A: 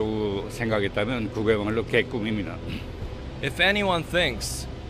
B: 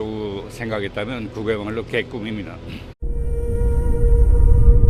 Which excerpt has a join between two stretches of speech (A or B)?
A